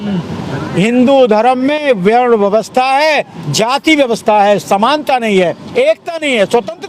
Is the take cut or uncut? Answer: uncut